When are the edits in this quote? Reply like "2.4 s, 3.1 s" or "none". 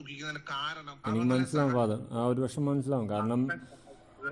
1.0 s